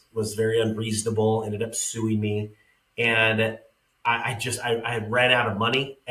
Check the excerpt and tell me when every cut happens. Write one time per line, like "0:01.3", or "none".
none